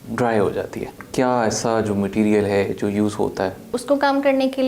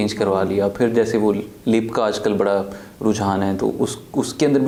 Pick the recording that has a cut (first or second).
first